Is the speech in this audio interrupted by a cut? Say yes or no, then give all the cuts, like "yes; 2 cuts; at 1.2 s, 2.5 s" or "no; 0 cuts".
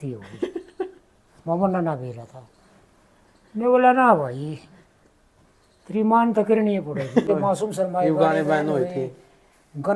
yes; 1 cut; at 7.2 s